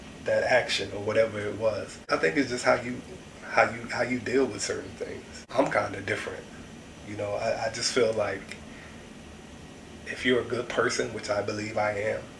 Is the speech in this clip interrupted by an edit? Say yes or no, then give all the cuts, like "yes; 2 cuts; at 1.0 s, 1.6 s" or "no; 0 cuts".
yes; 2 cuts; at 2.1 s, 5.5 s